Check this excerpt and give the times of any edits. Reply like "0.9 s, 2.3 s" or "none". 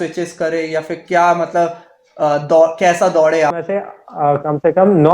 3.6 s